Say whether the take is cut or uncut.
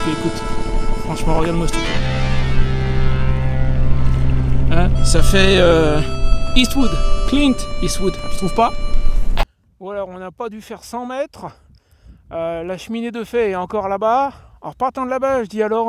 cut